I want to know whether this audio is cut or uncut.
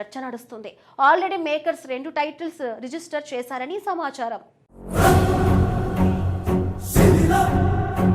cut